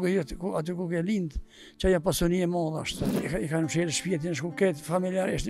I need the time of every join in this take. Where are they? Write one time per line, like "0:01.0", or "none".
0:03.0